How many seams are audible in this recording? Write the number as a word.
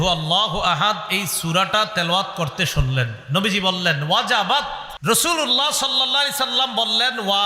one